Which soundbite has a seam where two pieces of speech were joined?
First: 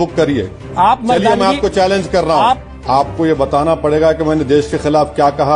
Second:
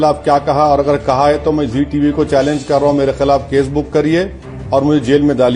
first; 1 cut; at 2.7 s

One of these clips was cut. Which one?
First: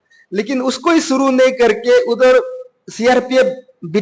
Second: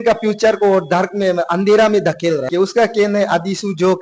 second; 1 cut; at 2.5 s

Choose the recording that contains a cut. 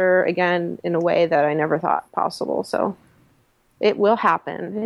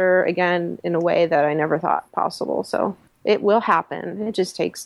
second; 1 cut; at 3.1 s

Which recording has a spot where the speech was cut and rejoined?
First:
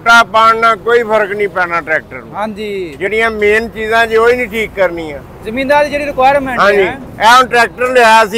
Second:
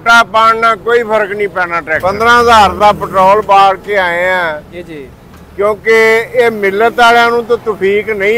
second; 1 cut; at 2.0 s

